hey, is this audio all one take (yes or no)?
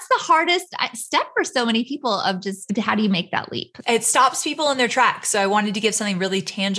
no